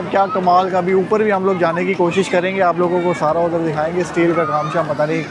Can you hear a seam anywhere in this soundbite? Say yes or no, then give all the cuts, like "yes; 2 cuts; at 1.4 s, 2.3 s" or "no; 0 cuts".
no; 0 cuts